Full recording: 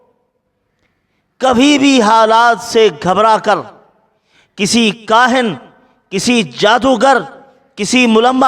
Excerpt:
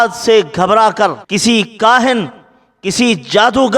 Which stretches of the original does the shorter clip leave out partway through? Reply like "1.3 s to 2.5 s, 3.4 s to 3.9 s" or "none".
3.7 s to 4.5 s